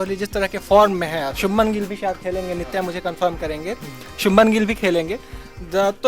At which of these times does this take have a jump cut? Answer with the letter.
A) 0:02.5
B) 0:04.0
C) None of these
C